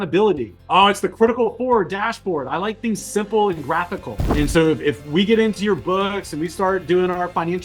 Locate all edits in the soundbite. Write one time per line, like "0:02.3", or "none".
0:04.2